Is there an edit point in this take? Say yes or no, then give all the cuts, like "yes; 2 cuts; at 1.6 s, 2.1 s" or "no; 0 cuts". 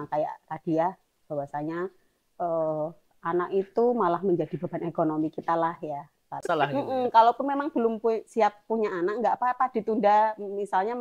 yes; 1 cut; at 6.4 s